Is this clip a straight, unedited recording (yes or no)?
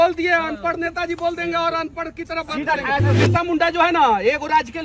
no